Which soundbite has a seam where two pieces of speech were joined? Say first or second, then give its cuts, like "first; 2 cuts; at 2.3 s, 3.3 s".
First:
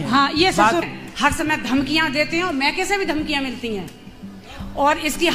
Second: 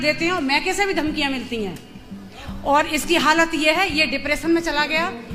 first; 1 cut; at 1.0 s